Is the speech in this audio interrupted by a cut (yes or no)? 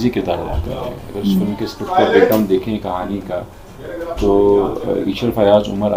no